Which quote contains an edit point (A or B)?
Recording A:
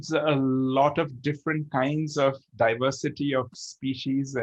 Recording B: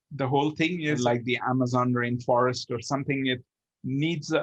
B